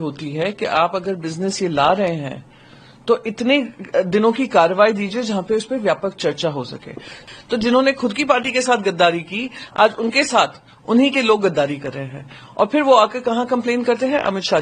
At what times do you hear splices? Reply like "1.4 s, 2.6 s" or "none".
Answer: 7.1 s